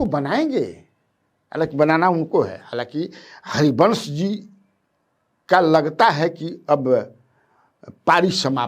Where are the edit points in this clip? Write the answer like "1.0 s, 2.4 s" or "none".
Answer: none